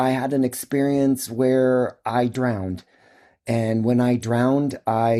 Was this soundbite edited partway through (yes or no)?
no